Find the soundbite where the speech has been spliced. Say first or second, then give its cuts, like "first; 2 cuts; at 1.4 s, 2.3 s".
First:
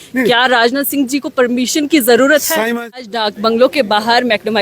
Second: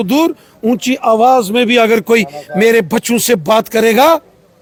first; 1 cut; at 3.0 s